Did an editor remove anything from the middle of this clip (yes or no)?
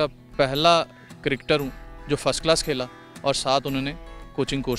no